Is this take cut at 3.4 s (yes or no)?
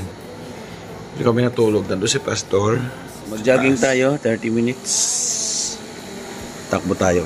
yes